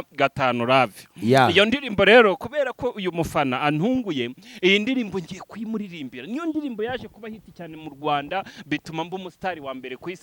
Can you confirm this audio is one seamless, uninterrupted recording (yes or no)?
yes